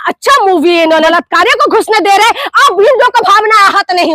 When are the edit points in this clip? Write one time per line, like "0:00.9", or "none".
0:01.1